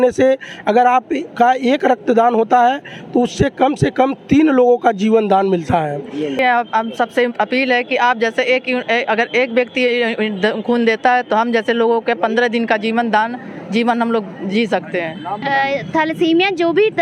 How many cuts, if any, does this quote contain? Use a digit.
2